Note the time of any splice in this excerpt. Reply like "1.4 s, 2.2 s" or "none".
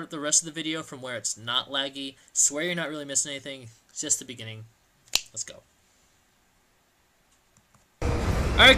none